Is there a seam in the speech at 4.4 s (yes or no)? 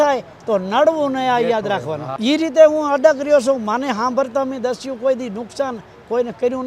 no